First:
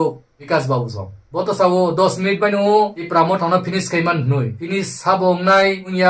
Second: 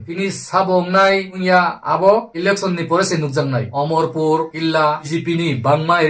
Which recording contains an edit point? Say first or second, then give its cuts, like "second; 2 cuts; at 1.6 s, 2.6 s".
second; 1 cut; at 5.1 s